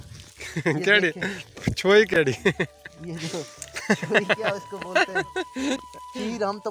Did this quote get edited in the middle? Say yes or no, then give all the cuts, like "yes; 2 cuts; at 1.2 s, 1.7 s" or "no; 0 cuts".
no; 0 cuts